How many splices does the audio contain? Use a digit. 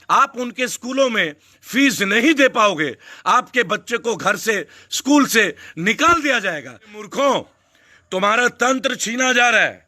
1